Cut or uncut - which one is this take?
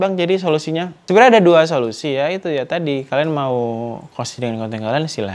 cut